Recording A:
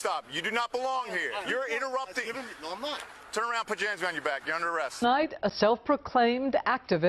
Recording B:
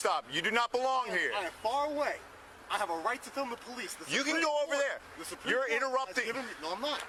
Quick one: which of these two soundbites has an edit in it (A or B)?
A